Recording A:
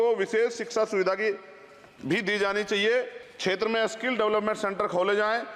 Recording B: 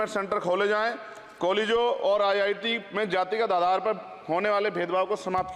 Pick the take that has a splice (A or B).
A